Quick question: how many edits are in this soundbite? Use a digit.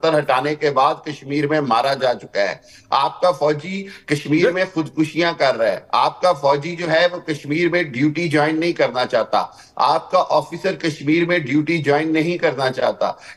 0